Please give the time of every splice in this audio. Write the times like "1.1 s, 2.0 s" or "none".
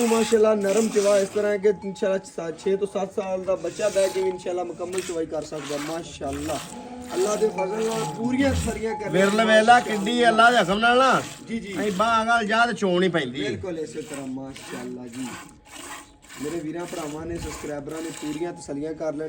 none